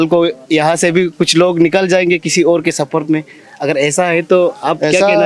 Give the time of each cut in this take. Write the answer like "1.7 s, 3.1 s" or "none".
none